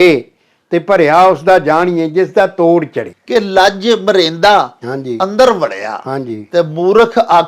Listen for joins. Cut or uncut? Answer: cut